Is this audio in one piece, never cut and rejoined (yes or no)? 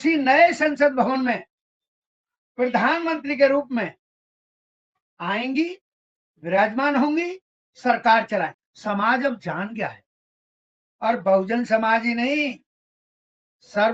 no